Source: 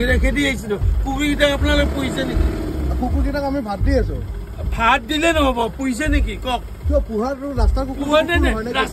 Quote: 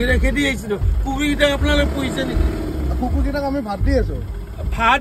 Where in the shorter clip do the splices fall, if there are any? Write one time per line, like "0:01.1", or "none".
none